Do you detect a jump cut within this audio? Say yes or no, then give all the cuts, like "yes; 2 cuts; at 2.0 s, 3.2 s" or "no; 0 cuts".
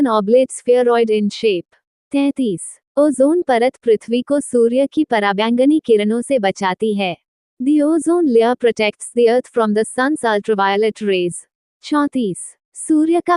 no; 0 cuts